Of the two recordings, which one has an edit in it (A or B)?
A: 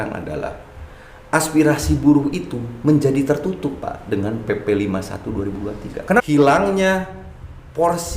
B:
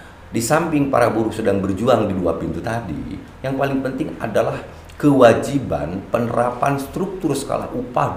A